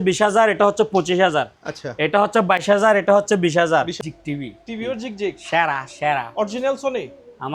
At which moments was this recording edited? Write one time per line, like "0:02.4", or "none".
0:04.1